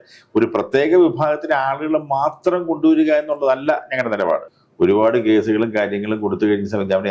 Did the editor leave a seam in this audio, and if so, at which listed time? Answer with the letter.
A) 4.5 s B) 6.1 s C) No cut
A